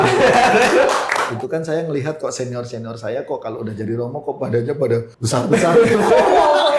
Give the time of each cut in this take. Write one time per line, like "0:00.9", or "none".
0:01.3
0:05.2